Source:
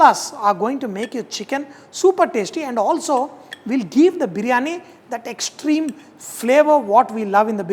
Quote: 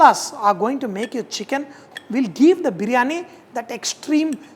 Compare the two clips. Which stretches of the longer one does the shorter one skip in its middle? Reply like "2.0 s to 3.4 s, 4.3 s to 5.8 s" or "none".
1.8 s to 3.4 s